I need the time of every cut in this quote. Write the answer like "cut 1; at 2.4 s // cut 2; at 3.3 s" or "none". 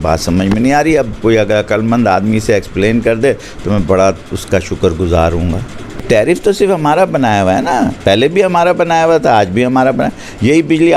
cut 1; at 6.0 s